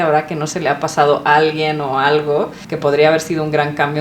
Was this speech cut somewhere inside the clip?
no; 0 cuts

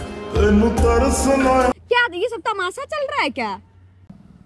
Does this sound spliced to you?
yes; 1 cut; at 1.8 s

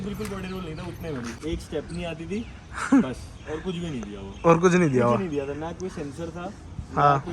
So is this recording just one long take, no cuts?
no; 1 cut; at 1.4 s

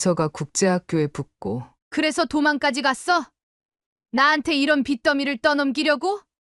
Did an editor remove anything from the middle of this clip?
no; 0 cuts

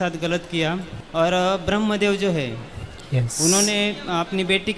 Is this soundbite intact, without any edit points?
no; 1 cut; at 0.9 s

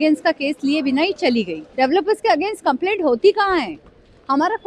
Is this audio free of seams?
no; 1 cut; at 1.6 s

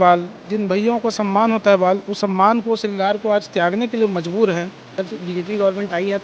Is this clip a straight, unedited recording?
no; 1 cut; at 4.9 s

